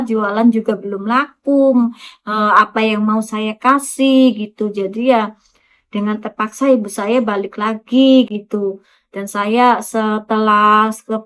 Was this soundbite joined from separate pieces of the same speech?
no; 0 cuts

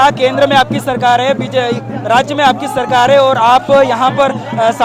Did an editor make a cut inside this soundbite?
no; 0 cuts

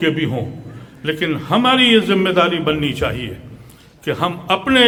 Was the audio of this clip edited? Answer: no; 0 cuts

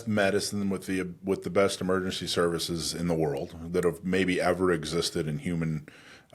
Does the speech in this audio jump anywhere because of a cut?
no; 0 cuts

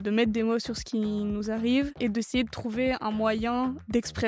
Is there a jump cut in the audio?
no; 0 cuts

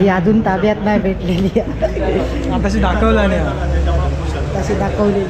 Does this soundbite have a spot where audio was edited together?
no; 0 cuts

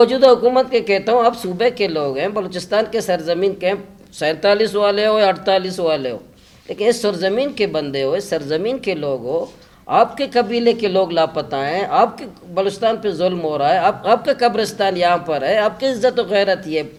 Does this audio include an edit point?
no; 0 cuts

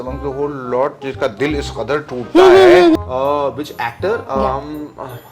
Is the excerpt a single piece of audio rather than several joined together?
no; 1 cut; at 3.1 s

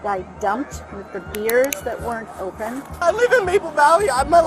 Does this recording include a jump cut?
yes; 1 cut; at 2.9 s

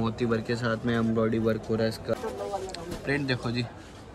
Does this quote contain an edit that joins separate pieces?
yes; 1 cut; at 2.1 s

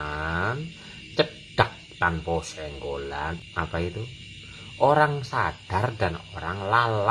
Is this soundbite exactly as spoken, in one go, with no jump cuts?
no; 1 cut; at 3.4 s

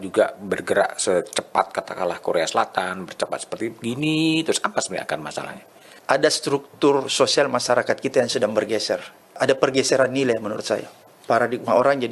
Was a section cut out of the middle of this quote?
yes; 2 cuts; at 6.0 s, 9.4 s

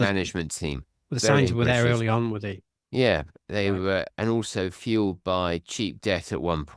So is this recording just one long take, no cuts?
yes; 0 cuts

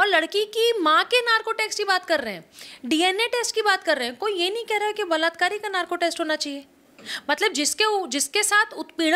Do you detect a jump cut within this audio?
no; 0 cuts

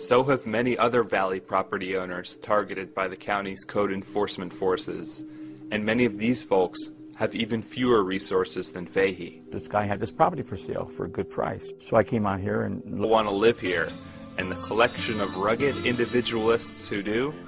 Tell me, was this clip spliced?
no; 0 cuts

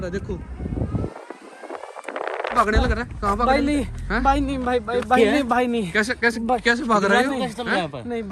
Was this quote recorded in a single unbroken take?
no; 1 cut; at 2.5 s

